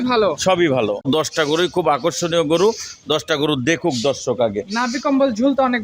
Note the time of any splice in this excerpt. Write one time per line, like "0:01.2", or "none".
0:01.1